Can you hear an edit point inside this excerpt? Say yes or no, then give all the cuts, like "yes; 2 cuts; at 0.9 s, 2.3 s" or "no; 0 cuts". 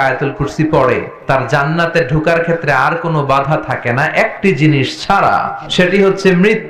yes; 2 cuts; at 1.1 s, 5.6 s